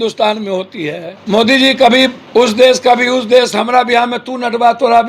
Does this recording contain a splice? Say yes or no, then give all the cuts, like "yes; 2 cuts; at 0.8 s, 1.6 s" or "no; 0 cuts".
yes; 2 cuts; at 1.1 s, 2.2 s